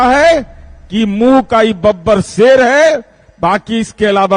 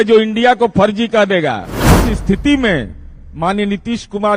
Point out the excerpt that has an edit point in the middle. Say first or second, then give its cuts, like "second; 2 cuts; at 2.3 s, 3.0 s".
second; 1 cut; at 1.8 s